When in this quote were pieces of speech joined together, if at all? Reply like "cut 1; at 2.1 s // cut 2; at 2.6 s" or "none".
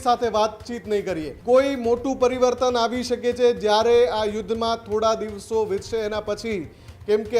cut 1; at 1.3 s